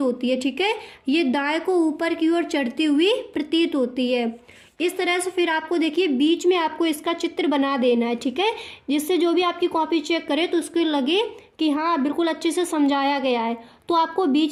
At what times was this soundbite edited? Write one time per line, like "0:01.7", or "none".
none